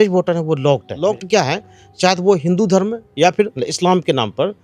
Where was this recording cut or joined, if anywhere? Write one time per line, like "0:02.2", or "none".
0:00.9
0:03.6